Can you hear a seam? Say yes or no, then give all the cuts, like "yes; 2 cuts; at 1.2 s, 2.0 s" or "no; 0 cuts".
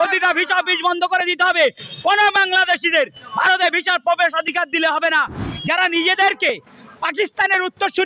yes; 1 cut; at 5.4 s